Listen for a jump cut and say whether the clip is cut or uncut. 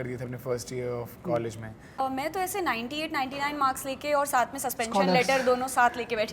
cut